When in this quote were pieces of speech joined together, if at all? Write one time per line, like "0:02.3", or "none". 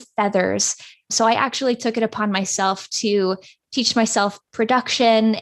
0:01.1

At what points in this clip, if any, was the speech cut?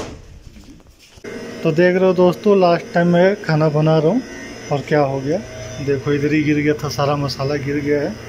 0:01.3

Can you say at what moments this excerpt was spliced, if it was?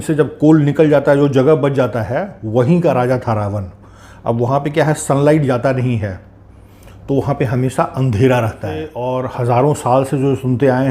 0:08.9

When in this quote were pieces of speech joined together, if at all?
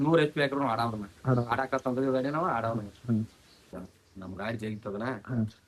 0:03.8

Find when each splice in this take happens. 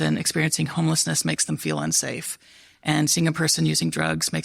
none

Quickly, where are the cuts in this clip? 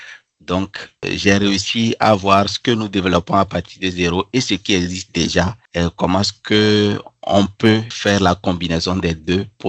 0:05.6
0:07.9

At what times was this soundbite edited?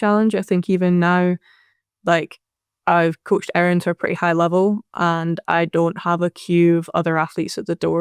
none

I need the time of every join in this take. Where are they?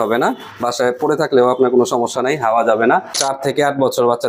0:03.2

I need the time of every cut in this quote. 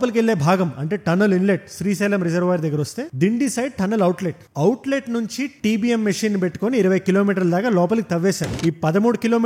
0:08.5

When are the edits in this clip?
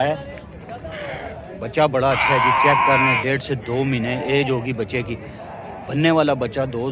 none

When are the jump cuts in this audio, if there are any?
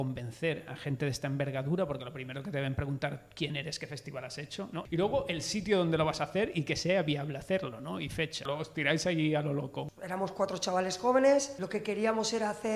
0:04.8
0:08.5
0:09.8
0:11.6

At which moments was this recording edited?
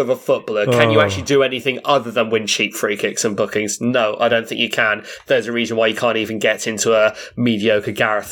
none

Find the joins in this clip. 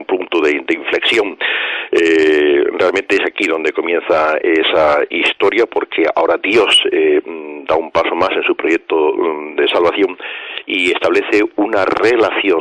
0:07.4

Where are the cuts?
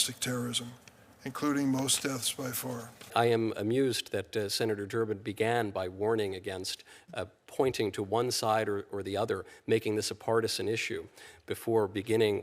0:03.1

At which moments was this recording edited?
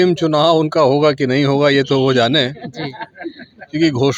none

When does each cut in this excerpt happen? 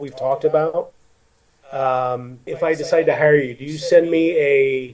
none

